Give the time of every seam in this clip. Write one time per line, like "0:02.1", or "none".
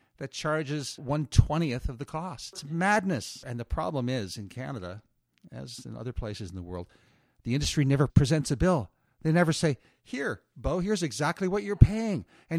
0:01.0
0:03.3